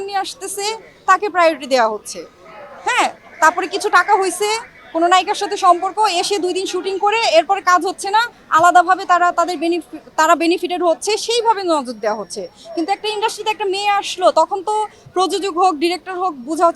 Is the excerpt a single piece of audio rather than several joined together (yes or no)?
yes